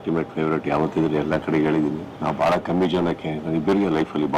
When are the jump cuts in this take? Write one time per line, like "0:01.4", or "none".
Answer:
0:02.1